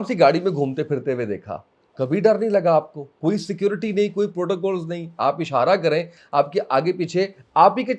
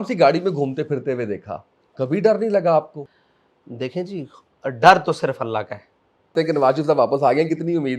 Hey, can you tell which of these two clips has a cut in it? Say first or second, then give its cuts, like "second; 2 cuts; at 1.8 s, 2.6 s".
second; 2 cuts; at 3.0 s, 6.3 s